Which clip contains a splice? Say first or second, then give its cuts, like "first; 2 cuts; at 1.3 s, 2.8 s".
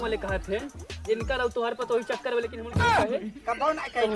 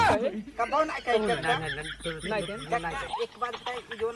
second; 1 cut; at 2.6 s